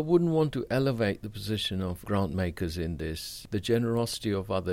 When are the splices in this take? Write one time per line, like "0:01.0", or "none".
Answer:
0:02.0
0:03.4